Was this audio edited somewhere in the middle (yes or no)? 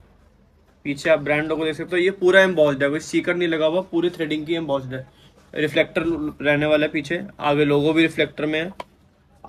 no